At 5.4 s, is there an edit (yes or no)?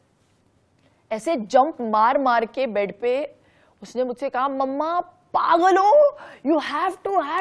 no